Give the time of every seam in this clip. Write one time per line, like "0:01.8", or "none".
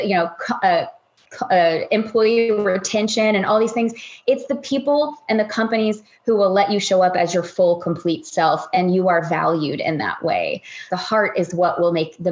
0:10.9